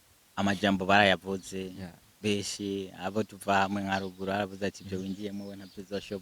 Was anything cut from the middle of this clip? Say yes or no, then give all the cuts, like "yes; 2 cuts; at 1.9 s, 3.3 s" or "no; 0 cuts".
no; 0 cuts